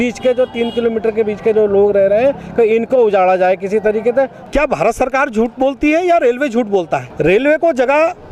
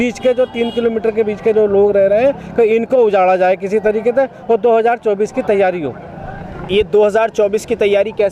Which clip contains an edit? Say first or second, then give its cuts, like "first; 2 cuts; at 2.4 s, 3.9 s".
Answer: first; 2 cuts; at 4.4 s, 7.1 s